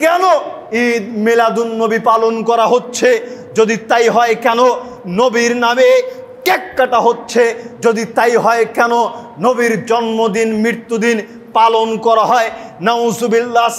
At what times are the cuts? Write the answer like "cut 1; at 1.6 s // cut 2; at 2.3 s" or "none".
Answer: none